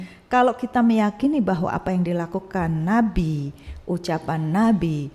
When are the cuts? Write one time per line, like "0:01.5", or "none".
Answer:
none